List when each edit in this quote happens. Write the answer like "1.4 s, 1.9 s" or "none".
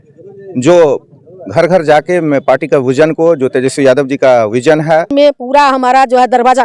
5.1 s